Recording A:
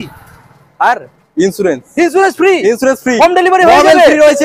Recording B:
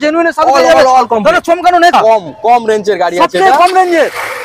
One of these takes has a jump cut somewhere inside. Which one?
B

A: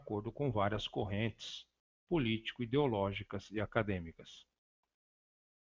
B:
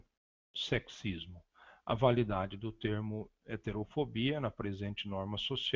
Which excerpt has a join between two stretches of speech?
B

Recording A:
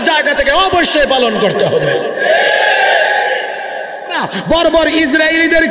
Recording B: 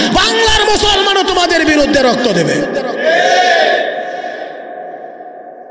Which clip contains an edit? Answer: A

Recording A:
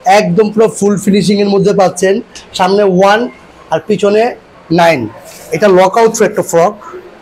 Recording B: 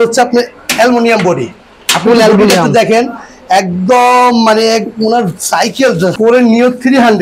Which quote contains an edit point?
B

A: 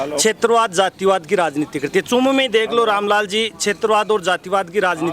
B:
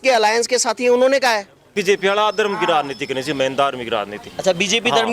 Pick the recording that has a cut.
B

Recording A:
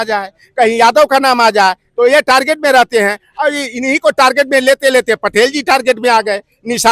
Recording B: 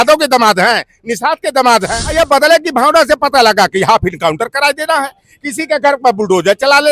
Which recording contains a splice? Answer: B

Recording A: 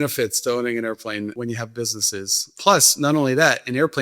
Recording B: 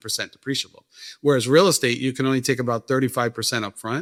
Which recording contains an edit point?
A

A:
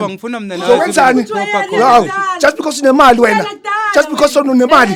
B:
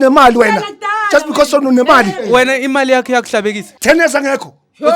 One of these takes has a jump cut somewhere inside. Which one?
B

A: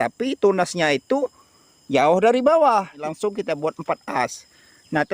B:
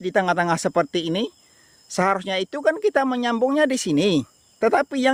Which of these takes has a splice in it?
A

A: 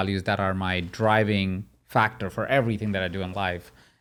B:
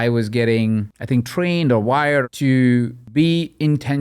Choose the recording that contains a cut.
B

